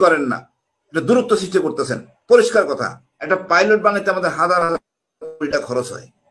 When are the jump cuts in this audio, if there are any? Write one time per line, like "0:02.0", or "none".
0:03.1

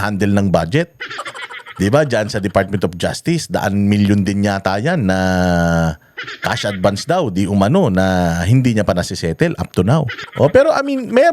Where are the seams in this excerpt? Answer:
0:10.2

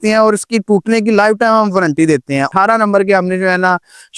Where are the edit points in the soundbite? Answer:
0:02.5

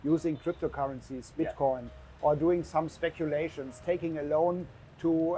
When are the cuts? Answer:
none

